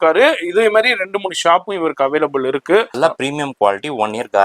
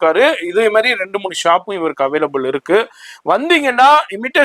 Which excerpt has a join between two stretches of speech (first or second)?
first